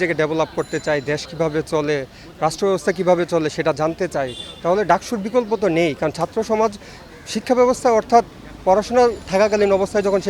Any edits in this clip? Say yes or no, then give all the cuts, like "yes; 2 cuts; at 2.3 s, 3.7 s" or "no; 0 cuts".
no; 0 cuts